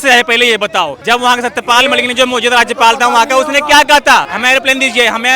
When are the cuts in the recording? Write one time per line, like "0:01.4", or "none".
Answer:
0:01.0
0:04.3